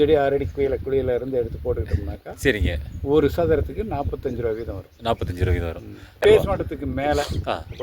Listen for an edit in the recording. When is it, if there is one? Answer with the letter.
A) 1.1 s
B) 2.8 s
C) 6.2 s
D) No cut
C